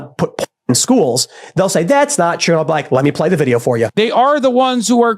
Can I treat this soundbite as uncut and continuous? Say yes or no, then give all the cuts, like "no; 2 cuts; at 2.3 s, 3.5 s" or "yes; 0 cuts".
no; 1 cut; at 3.9 s